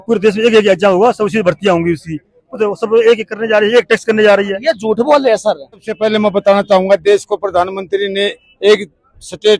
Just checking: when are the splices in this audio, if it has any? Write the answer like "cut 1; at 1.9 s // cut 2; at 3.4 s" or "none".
cut 1; at 5.9 s